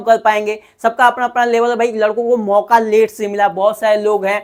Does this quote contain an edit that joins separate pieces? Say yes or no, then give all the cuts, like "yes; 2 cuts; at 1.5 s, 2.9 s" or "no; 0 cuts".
no; 0 cuts